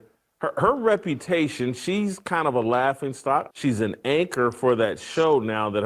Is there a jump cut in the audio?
yes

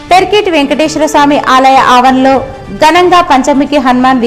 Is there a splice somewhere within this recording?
no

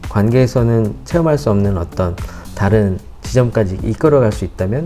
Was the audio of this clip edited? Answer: no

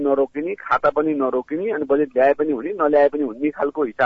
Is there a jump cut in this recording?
no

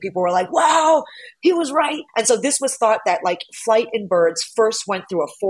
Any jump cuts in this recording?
no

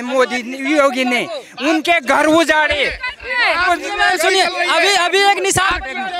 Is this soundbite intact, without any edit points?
yes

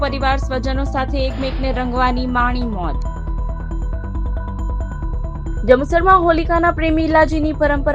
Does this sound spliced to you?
no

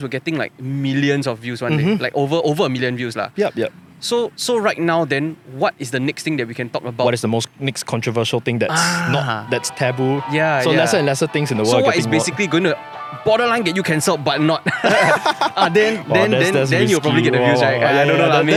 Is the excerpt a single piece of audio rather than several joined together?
yes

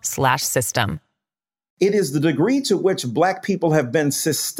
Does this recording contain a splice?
yes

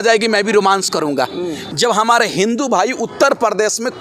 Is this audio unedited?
no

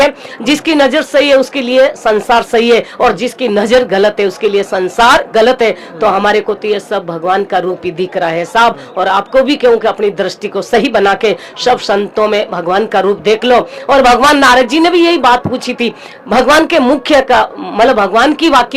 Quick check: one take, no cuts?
yes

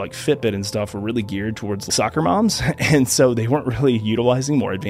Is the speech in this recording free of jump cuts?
no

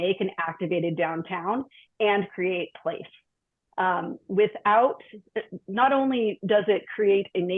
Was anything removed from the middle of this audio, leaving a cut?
no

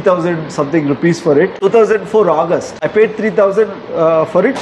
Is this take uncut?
yes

